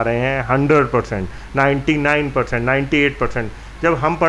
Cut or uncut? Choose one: uncut